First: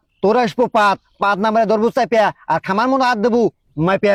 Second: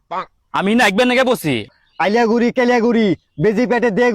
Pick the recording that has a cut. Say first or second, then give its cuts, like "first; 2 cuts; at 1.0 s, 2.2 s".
second; 1 cut; at 1.7 s